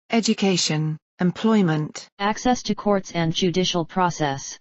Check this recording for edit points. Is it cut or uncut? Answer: cut